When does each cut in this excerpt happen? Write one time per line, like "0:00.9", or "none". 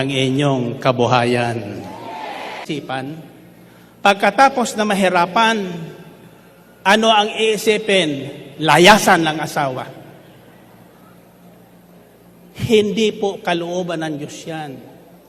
0:02.6